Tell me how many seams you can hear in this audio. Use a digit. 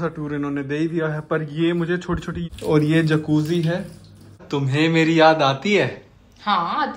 2